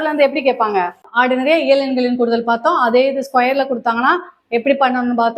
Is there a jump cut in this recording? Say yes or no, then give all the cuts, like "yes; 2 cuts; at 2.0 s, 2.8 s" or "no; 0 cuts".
yes; 1 cut; at 1.0 s